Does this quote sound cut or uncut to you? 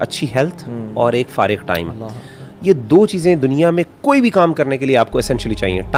uncut